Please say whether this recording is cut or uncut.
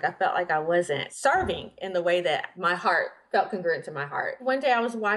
cut